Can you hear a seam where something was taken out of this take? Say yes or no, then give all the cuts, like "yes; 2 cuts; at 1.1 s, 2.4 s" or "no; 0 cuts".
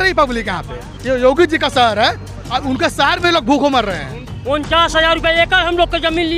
yes; 2 cuts; at 0.9 s, 4.3 s